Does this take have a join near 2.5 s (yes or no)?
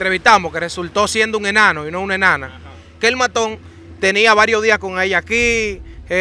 no